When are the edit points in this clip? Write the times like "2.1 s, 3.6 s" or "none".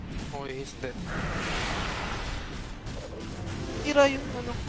none